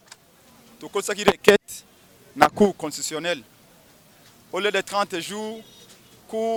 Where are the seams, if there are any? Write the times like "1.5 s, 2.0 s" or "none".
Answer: none